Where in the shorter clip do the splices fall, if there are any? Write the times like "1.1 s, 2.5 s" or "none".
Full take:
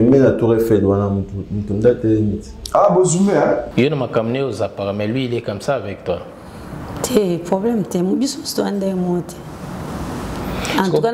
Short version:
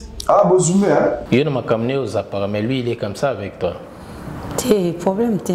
none